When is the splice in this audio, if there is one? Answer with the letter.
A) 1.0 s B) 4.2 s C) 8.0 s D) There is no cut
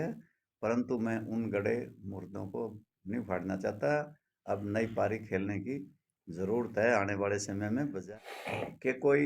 C